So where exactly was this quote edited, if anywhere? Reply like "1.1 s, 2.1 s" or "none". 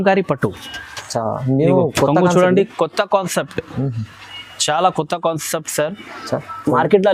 none